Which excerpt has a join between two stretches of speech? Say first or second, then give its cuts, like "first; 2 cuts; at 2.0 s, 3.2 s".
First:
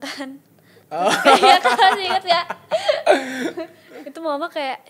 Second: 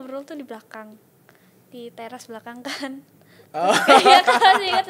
first; 1 cut; at 3.8 s